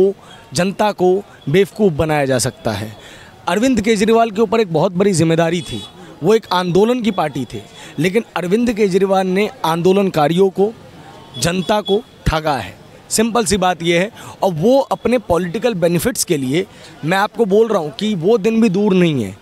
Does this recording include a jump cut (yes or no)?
no